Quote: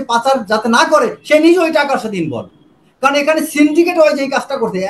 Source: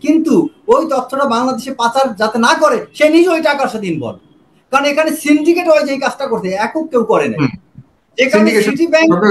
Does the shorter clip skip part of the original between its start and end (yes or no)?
no